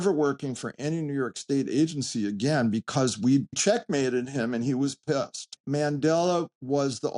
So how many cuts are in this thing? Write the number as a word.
two